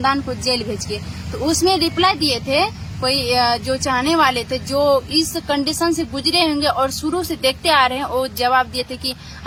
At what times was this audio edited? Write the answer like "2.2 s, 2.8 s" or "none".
none